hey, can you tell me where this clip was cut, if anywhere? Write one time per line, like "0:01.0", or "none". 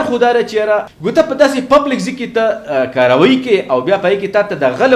0:01.0